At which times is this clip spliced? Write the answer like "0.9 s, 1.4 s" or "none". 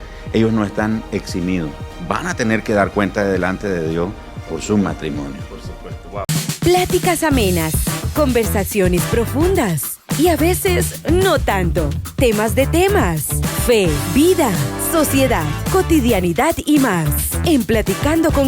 6.6 s